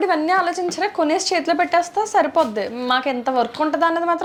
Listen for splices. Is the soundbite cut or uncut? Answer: uncut